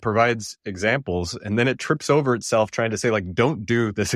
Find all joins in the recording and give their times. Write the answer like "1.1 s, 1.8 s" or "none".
none